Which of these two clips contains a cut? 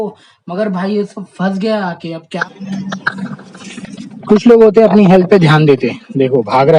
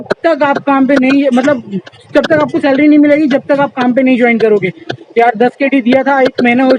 first; 1 cut; at 2.3 s

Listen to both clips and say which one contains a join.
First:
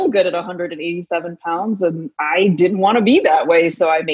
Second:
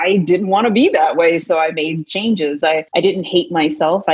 second; 1 cut; at 2.9 s

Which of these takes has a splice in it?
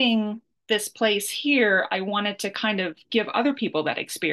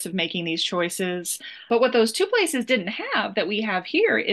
second; 1 cut; at 1.6 s

